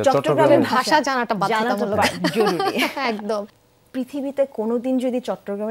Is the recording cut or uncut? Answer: cut